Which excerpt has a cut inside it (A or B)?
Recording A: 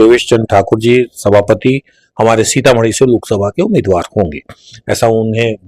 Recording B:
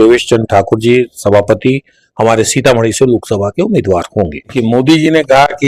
B